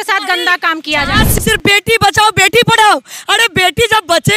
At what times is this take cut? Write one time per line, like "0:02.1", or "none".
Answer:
0:01.3